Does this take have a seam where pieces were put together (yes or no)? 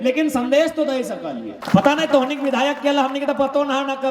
yes